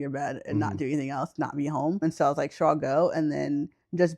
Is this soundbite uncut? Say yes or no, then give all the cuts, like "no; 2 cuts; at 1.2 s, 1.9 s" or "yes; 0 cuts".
no; 1 cut; at 2.0 s